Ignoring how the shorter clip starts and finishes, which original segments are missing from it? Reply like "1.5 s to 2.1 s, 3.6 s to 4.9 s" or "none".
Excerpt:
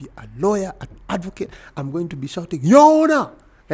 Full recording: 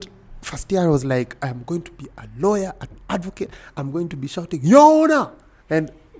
none